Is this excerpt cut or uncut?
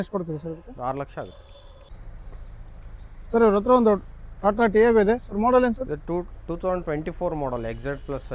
uncut